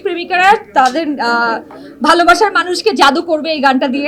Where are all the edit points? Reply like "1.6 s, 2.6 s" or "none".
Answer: none